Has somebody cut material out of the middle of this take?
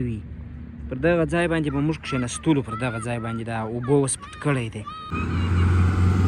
yes; 1 cut; at 5.1 s

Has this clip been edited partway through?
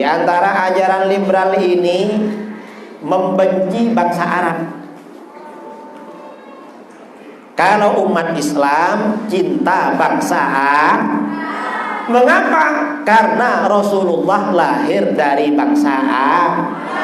no; 0 cuts

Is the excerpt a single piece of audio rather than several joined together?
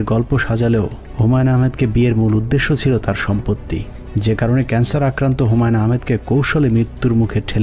yes; 0 cuts

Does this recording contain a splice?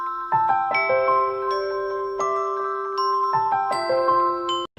no; 0 cuts

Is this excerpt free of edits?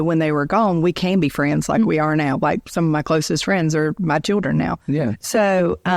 yes; 0 cuts

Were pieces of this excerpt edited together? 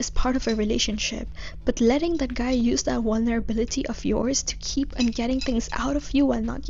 no; 0 cuts

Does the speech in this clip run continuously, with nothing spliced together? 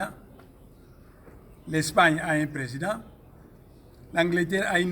yes; 0 cuts

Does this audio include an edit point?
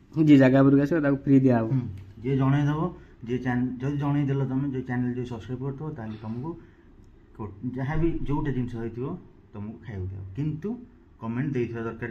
no; 0 cuts

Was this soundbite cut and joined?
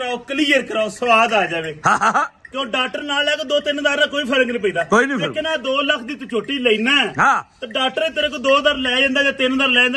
no; 0 cuts

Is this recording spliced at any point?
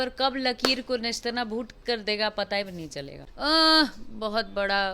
yes; 1 cut; at 3.2 s

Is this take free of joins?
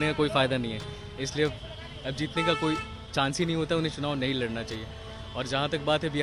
yes; 0 cuts

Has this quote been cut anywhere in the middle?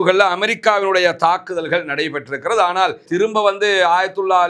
yes; 1 cut; at 3.0 s

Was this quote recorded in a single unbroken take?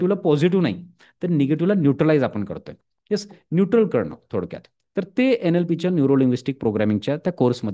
yes; 0 cuts

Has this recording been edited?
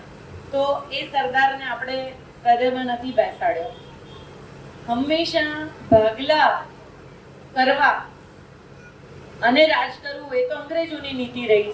no; 0 cuts

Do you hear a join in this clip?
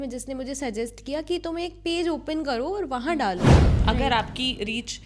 yes; 1 cut; at 3.6 s

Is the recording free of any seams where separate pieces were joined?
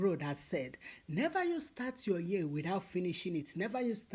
yes; 0 cuts

